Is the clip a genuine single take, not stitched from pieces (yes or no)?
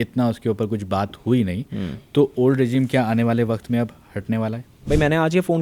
no